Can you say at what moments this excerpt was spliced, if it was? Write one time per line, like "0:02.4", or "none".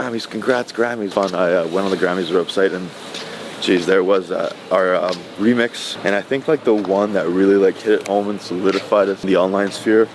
0:01.1
0:05.9